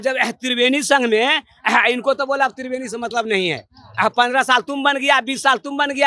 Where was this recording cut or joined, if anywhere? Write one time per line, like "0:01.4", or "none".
none